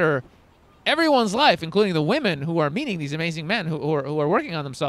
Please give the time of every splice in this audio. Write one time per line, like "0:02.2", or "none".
none